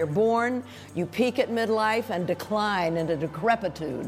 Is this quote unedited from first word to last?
yes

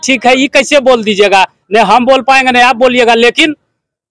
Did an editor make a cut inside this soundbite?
no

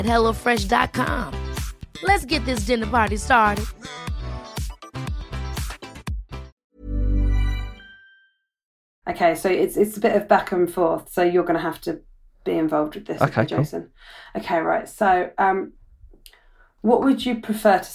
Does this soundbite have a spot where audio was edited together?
yes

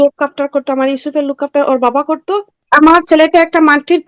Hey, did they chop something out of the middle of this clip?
yes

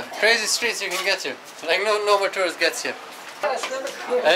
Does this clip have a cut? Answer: yes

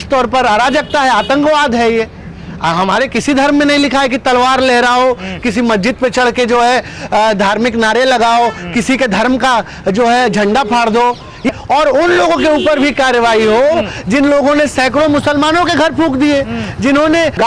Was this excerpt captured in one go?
no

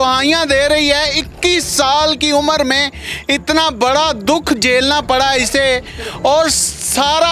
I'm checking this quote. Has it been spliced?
no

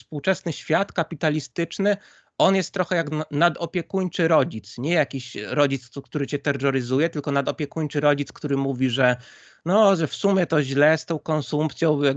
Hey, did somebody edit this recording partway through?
no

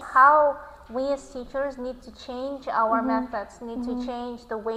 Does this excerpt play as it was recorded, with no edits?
yes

